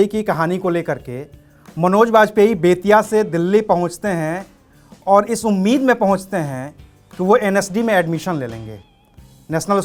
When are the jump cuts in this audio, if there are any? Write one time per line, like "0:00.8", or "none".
none